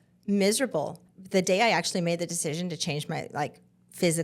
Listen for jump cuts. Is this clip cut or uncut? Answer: cut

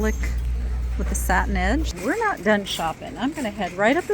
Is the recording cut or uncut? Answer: cut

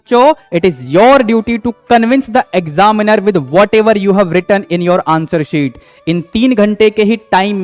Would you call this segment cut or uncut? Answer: uncut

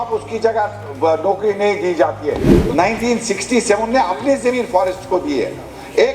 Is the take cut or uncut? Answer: cut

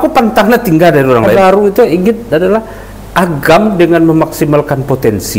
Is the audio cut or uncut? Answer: cut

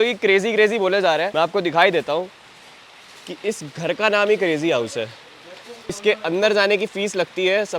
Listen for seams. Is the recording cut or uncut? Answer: uncut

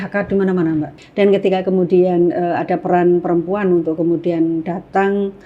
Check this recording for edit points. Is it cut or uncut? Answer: cut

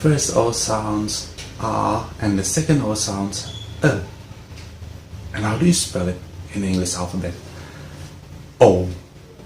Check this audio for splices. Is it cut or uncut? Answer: uncut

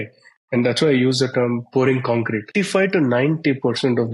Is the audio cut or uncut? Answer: cut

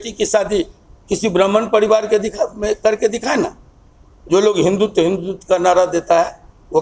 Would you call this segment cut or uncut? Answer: uncut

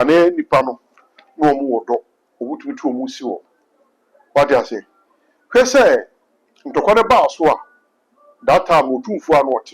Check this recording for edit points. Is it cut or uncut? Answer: uncut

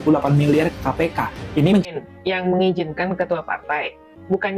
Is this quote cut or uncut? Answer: cut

